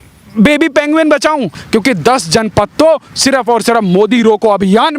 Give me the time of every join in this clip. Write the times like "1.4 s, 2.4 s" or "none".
1.6 s